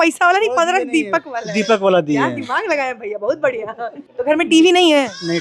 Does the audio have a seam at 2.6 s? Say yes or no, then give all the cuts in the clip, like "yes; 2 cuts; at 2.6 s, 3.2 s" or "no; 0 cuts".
no; 1 cut; at 4.0 s